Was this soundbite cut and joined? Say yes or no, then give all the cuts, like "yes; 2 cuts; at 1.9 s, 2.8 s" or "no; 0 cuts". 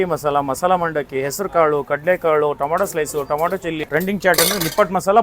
yes; 1 cut; at 3.8 s